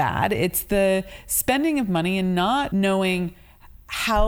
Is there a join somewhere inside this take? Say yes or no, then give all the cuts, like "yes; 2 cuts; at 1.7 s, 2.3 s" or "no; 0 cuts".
yes; 1 cut; at 2.7 s